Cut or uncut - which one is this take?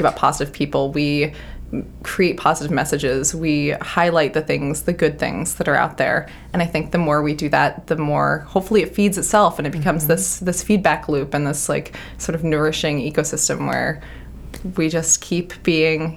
uncut